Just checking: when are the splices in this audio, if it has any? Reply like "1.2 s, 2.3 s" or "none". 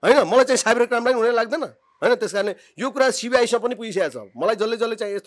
none

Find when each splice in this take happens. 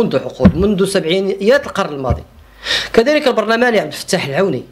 none

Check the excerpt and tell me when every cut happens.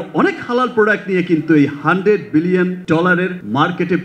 3.1 s

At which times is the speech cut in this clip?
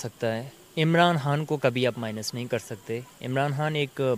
none

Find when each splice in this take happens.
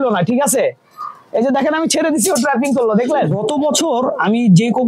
3.4 s

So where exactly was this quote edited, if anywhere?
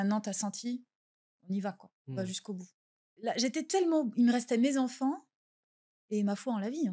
3.1 s

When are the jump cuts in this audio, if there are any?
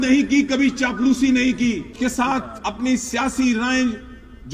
1.9 s

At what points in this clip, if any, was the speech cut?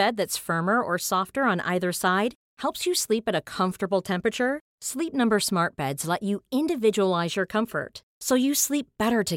none

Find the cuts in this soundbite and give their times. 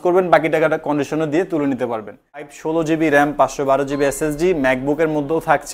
2.5 s

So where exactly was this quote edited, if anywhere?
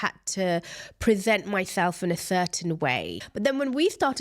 3.2 s

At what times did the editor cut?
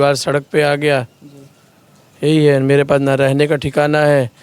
none

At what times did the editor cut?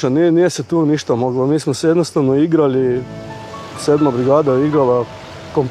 none

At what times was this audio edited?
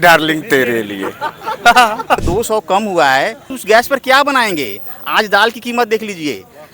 2.2 s, 3.6 s

